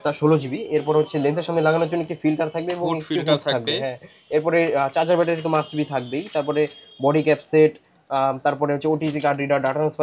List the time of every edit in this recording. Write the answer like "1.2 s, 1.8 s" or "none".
none